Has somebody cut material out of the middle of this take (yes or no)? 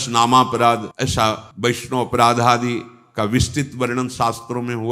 yes